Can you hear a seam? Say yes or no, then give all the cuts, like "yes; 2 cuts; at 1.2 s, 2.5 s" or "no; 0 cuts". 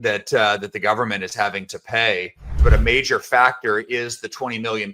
yes; 1 cut; at 2.4 s